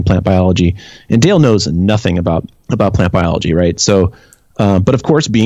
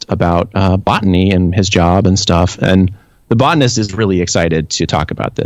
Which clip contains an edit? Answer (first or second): first